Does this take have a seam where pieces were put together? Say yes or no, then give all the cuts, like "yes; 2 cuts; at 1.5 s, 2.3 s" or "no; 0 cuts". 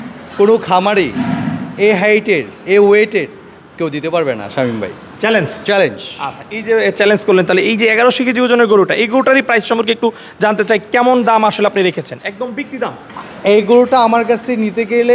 no; 0 cuts